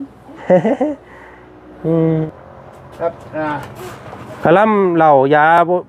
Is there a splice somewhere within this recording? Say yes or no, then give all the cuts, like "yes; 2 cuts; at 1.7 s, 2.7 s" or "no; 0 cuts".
yes; 1 cut; at 2.3 s